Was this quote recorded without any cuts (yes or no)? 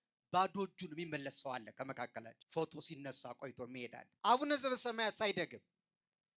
no